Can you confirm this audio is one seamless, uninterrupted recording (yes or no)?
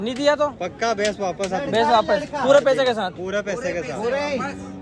yes